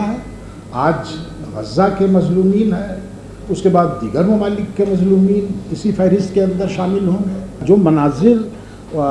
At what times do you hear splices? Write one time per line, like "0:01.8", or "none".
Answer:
0:07.6